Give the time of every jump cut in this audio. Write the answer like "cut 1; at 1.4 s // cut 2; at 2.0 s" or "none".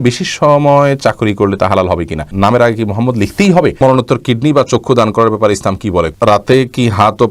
cut 1; at 2.3 s // cut 2; at 3.8 s // cut 3; at 6.1 s